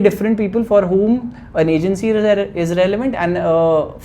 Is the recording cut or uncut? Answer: uncut